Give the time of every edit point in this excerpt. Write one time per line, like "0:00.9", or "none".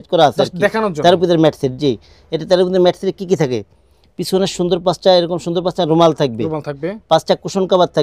none